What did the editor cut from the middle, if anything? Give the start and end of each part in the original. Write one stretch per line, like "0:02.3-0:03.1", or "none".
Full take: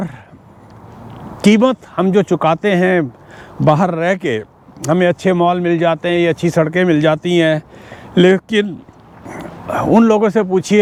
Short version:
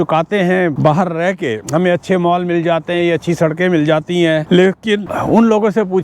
0:03.1-0:03.6
0:04.4-0:04.8
0:07.6-0:08.1
0:08.7-0:09.7